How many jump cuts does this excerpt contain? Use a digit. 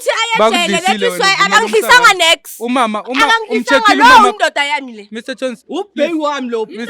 0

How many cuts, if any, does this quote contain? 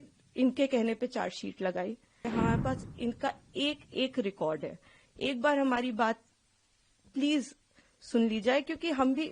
1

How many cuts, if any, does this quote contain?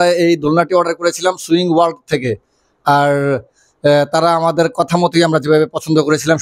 0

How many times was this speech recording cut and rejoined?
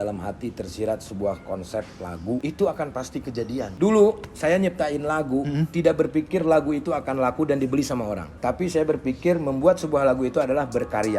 3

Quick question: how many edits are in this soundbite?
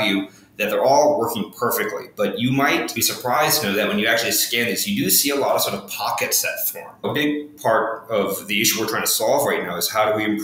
1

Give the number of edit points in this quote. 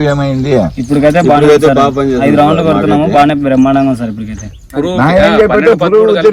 1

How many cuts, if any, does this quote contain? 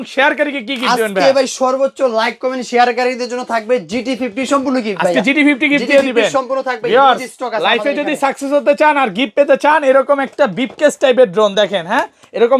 0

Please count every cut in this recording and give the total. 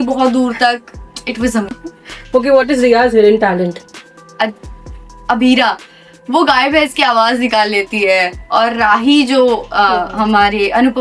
2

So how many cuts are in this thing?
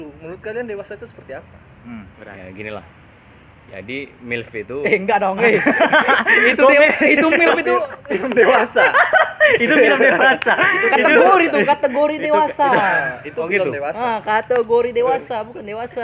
1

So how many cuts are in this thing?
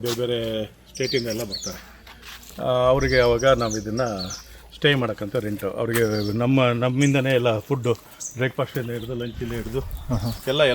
0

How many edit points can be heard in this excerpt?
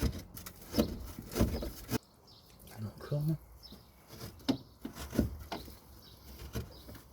1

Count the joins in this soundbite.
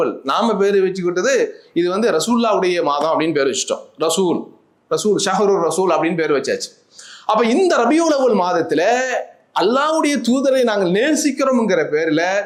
0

